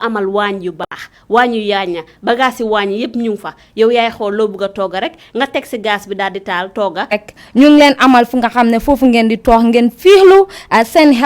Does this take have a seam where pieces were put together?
yes; 1 cut; at 7.2 s

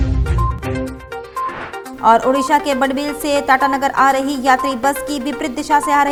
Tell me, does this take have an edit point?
no; 0 cuts

